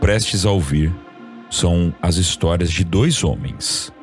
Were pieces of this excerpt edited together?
no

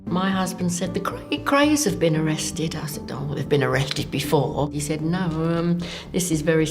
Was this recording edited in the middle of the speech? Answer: yes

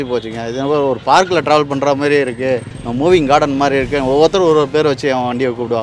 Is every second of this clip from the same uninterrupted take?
no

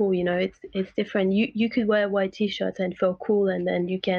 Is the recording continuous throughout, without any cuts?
yes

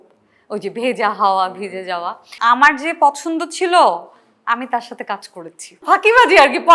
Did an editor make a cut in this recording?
yes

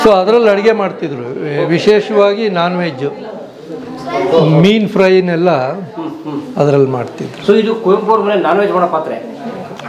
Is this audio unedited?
yes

